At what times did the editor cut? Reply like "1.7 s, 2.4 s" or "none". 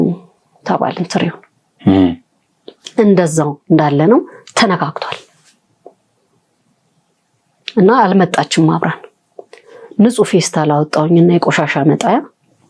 none